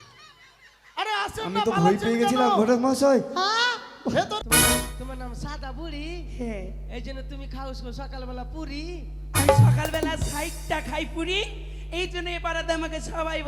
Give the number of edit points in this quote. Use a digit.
1